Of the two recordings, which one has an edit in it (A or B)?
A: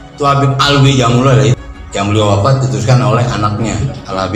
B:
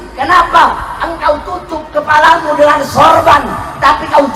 A